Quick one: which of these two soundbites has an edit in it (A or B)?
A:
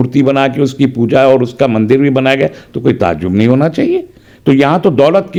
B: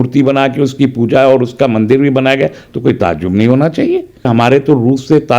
B